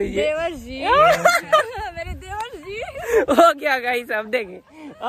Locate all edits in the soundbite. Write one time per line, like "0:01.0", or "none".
none